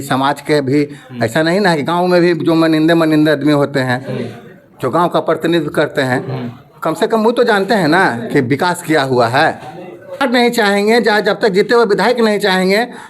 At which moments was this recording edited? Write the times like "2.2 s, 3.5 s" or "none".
10.2 s